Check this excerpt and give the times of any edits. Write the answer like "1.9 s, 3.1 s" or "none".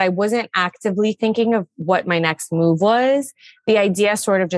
none